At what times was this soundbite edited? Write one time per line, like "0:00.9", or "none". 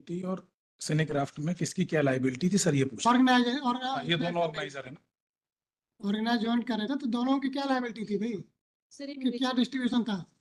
none